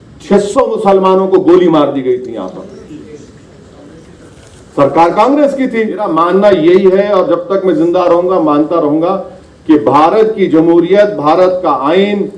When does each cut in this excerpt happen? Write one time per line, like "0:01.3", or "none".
0:06.1